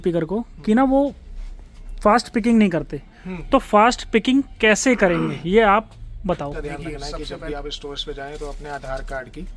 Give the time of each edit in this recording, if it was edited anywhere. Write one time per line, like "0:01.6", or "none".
0:07.1